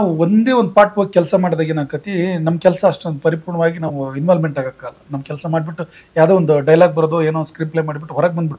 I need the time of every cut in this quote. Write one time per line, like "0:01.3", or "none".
none